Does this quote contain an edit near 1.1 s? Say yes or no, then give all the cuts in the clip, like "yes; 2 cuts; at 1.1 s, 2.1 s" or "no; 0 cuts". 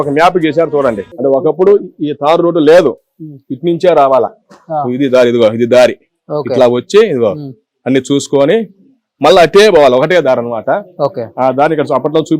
yes; 1 cut; at 1.1 s